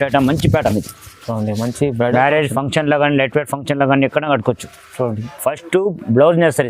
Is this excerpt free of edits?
no; 1 cut; at 5.2 s

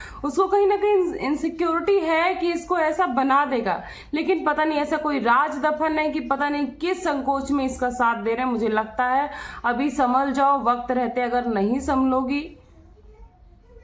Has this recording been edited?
no; 0 cuts

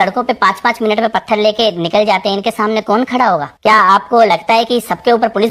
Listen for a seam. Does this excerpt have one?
no; 0 cuts

